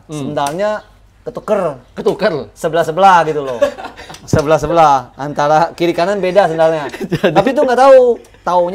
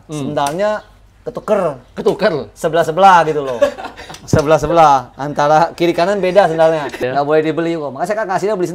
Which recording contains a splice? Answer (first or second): second